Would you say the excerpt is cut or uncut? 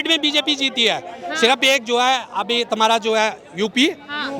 uncut